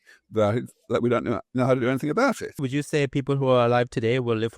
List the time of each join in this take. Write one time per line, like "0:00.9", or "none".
0:02.6